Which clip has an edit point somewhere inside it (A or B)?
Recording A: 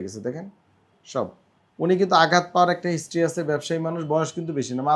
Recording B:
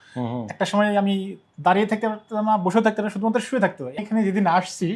B